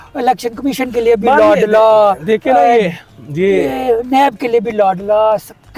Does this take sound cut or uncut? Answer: uncut